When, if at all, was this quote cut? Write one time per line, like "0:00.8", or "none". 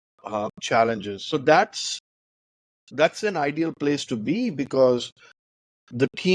0:01.2